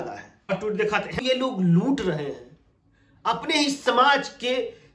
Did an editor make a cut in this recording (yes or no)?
yes